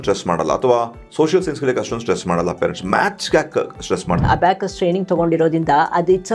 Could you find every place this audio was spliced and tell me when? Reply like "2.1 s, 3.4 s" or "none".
4.2 s